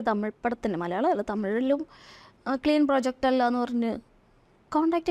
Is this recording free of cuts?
yes; 0 cuts

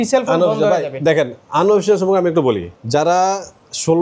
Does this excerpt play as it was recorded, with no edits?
no; 1 cut; at 2.7 s

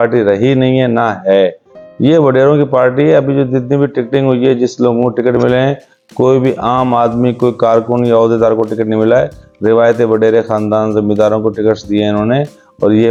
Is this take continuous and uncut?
yes; 0 cuts

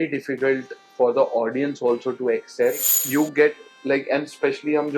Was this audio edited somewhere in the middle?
yes; 1 cut; at 2.9 s

